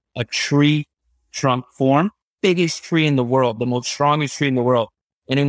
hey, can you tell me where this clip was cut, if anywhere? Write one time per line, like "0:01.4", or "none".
0:02.2